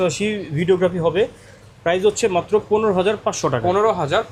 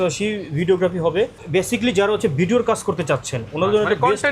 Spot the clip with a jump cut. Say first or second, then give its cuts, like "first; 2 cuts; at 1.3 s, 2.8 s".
second; 1 cut; at 1.4 s